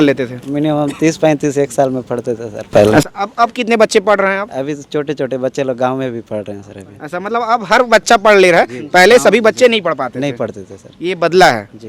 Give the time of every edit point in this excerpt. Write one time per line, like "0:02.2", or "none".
none